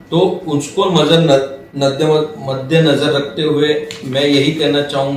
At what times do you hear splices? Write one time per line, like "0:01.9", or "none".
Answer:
none